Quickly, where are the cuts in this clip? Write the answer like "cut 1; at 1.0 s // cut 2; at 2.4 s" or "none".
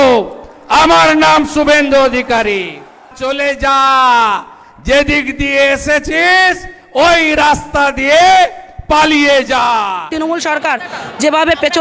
cut 1; at 3.2 s // cut 2; at 10.1 s